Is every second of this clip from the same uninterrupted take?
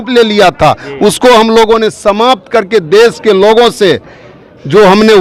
yes; 0 cuts

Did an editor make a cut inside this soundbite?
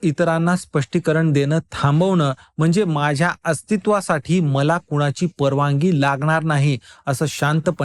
no; 0 cuts

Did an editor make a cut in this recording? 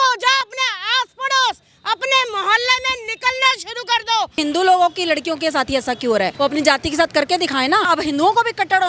yes; 3 cuts; at 4.4 s, 6.4 s, 7.9 s

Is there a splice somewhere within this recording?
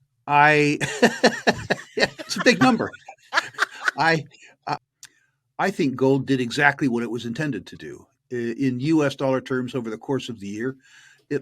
yes; 1 cut; at 4.9 s

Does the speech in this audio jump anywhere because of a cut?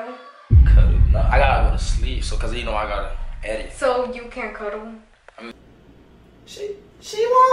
no; 0 cuts

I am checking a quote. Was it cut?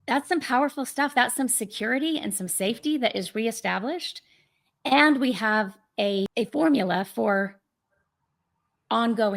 yes; 1 cut; at 6.3 s

